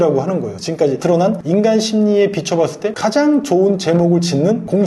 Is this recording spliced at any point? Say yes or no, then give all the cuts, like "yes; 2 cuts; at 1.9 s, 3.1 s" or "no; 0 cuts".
yes; 1 cut; at 2.9 s